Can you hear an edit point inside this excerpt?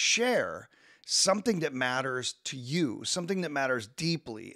no; 0 cuts

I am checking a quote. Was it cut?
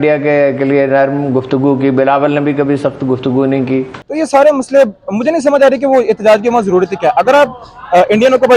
yes; 1 cut; at 4.0 s

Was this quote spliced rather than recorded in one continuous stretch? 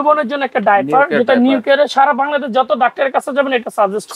no; 0 cuts

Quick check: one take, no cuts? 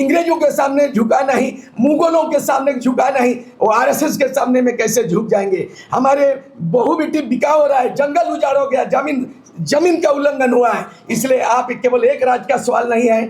yes; 0 cuts

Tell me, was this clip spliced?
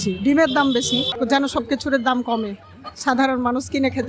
yes; 1 cut; at 1.1 s

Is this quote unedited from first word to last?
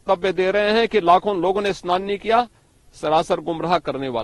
yes; 0 cuts

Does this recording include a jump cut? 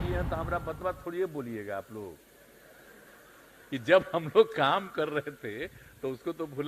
no; 0 cuts

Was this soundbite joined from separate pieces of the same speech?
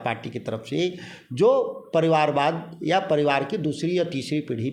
no; 0 cuts

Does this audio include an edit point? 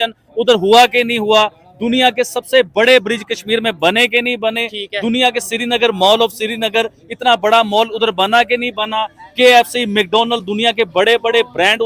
no; 0 cuts

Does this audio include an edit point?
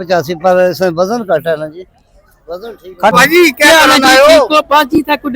yes; 1 cut; at 3.1 s

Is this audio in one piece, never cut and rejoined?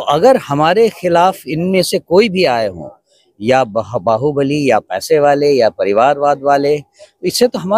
yes; 0 cuts

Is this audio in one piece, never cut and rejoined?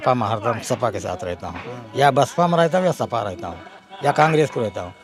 yes; 0 cuts

